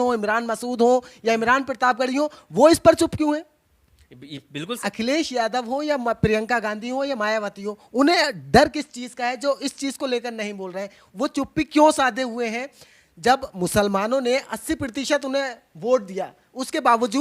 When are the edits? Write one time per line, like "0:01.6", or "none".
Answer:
0:04.8

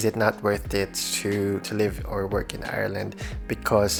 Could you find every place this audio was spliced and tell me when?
none

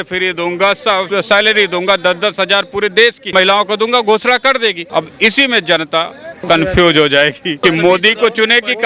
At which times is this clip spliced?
0:01.1
0:03.2
0:04.8
0:06.2
0:07.5

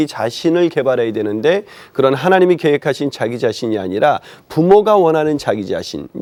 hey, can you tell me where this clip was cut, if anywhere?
none

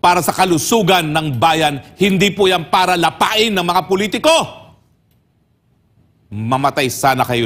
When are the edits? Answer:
none

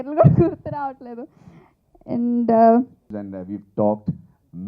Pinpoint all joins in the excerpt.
0:03.1

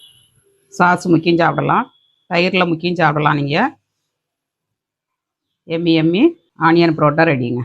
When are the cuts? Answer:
0:06.5

